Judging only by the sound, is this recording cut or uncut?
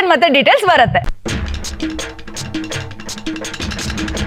uncut